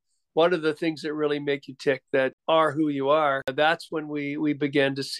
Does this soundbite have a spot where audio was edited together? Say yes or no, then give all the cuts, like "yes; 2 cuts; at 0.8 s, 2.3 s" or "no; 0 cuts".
yes; 2 cuts; at 2.4 s, 3.5 s